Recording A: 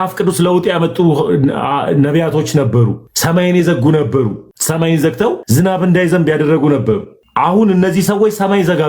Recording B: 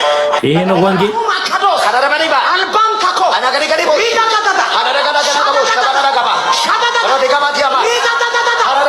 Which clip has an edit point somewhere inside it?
A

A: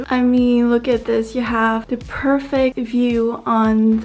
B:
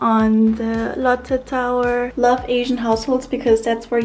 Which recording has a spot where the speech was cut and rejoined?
B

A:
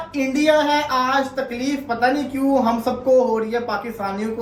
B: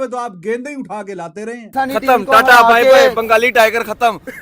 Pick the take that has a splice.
B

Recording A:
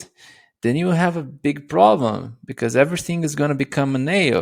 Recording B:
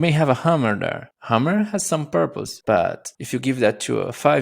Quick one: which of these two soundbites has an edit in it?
B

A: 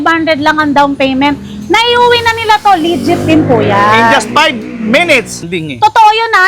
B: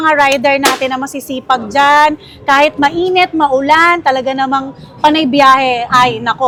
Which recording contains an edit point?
A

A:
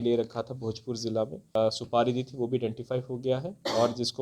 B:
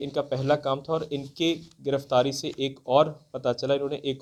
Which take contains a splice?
A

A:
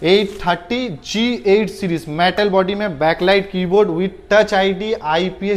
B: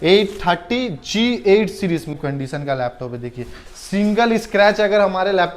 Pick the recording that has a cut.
B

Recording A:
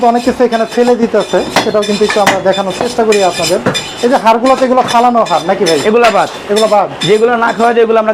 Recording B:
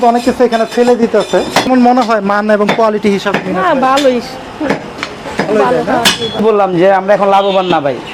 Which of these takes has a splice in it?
B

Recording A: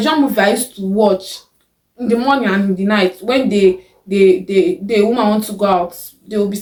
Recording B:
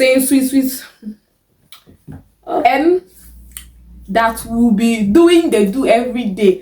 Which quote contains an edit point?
B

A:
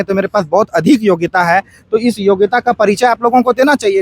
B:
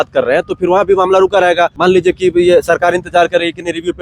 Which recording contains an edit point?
B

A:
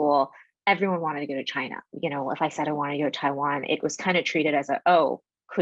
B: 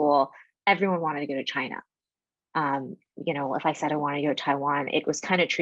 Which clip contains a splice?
A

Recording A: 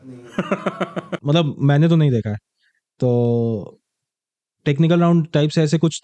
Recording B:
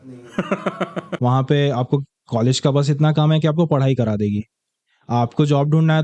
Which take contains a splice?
B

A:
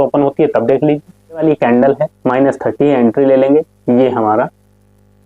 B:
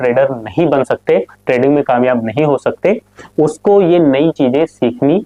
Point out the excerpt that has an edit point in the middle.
A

